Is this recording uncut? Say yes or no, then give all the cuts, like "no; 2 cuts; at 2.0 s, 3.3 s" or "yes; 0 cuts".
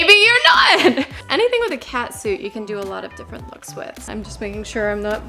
no; 2 cuts; at 1.2 s, 4.1 s